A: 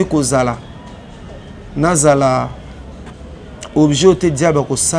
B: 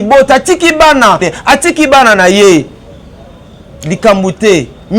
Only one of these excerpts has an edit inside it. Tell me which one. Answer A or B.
B